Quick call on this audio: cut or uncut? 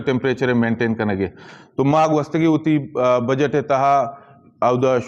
uncut